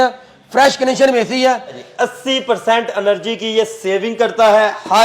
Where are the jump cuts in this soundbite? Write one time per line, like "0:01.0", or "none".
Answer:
0:01.8